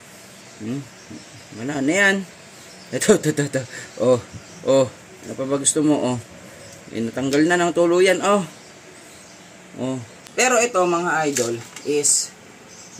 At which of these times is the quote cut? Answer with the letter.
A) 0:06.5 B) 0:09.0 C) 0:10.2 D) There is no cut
C